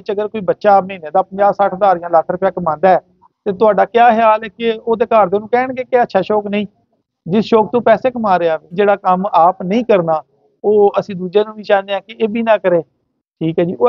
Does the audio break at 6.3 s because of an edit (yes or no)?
no